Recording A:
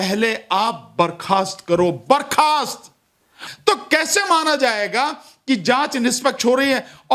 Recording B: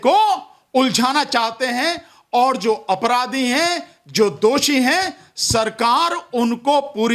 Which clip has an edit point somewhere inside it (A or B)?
A